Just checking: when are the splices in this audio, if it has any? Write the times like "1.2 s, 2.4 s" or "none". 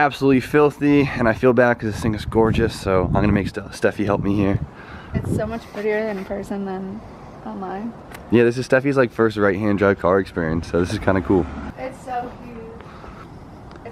2.2 s